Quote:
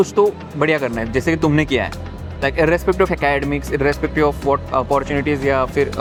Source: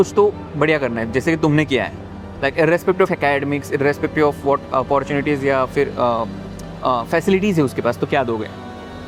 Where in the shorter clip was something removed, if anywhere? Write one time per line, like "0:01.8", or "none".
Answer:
none